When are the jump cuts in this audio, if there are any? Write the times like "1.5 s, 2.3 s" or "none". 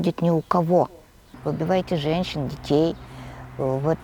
1.3 s